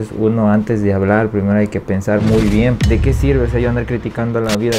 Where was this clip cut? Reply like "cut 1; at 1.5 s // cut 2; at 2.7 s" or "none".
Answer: cut 1; at 2.8 s